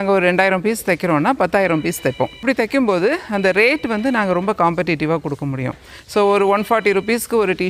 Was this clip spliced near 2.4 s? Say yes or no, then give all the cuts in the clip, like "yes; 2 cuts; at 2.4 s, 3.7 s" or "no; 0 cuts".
yes; 1 cut; at 2.4 s